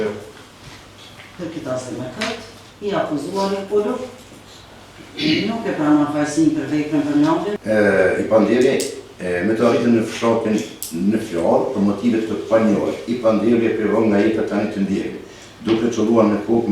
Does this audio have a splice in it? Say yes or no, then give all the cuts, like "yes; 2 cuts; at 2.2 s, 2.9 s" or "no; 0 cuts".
yes; 1 cut; at 7.6 s